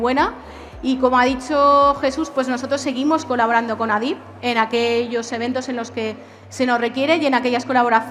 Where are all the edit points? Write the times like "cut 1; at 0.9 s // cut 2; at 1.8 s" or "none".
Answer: none

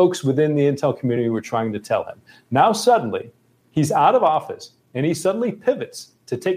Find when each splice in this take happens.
none

